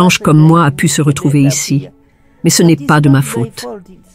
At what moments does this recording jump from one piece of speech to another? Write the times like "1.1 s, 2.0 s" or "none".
none

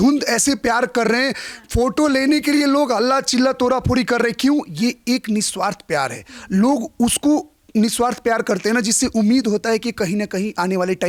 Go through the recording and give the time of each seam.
none

